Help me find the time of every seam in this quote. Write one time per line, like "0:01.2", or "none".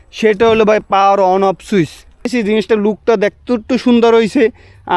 0:02.3